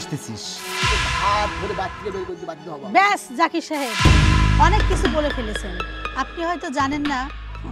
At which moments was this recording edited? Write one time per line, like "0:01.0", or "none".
0:00.9